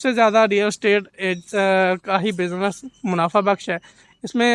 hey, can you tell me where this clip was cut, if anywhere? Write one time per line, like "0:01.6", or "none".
none